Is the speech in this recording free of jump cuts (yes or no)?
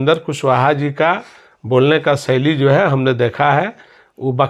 yes